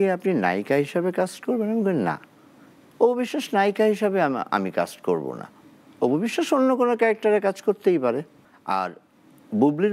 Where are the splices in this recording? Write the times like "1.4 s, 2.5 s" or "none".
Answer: none